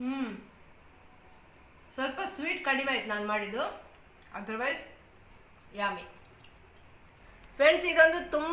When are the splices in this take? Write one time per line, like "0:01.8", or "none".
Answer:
0:07.3